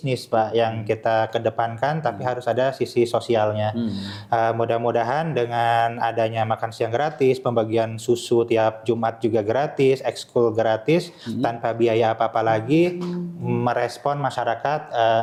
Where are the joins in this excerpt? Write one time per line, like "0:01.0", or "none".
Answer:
none